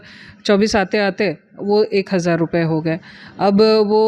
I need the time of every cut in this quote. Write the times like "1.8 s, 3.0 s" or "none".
none